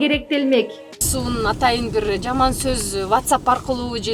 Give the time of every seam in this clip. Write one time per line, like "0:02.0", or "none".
0:01.0